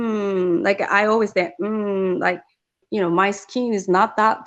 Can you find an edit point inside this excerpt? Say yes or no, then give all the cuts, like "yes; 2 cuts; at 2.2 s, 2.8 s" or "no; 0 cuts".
yes; 1 cut; at 2.8 s